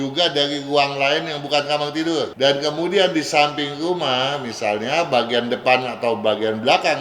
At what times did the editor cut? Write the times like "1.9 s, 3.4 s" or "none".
2.3 s